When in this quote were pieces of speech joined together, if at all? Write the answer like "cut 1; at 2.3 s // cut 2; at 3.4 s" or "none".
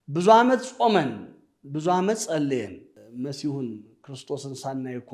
cut 1; at 3.0 s

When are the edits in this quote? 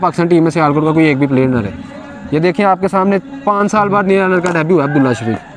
none

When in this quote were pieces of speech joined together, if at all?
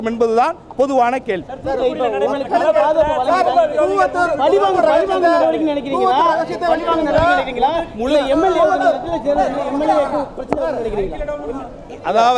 none

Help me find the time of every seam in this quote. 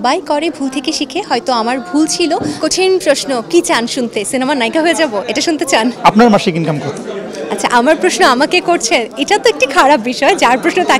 cut 1; at 2.5 s // cut 2; at 5.9 s

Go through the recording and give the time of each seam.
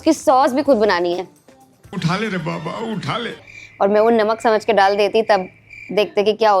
cut 1; at 3.5 s

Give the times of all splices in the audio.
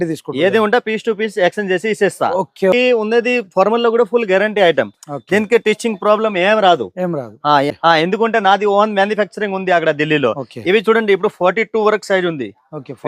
cut 1; at 2.7 s // cut 2; at 7.7 s

